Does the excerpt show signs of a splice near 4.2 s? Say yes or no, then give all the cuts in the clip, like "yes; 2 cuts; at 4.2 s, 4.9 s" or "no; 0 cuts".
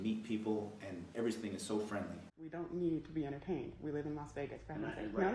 no; 2 cuts; at 1.0 s, 2.4 s